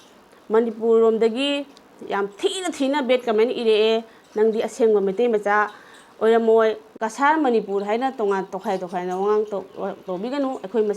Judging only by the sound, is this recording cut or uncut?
cut